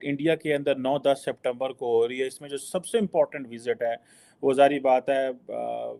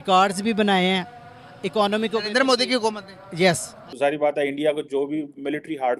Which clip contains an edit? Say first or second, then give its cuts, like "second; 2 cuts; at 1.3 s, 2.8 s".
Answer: second; 1 cut; at 3.9 s